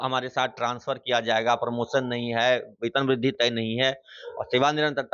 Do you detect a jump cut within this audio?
no; 0 cuts

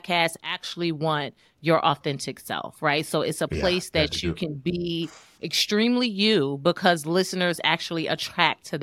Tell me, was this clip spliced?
no; 0 cuts

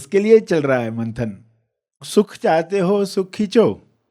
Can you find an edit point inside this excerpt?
yes; 1 cut; at 2.0 s

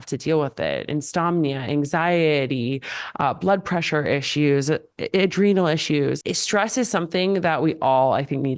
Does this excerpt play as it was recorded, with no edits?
no; 1 cut; at 6.2 s

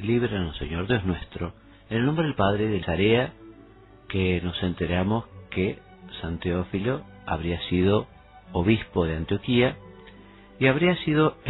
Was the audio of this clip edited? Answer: no; 0 cuts

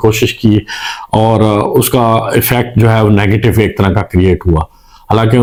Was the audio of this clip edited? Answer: no; 0 cuts

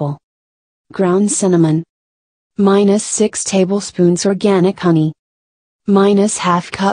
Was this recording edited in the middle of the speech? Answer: yes; 1 cut; at 4.1 s

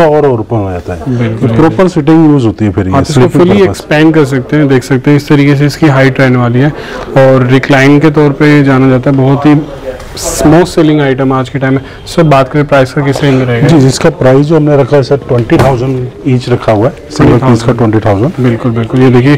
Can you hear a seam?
no; 0 cuts

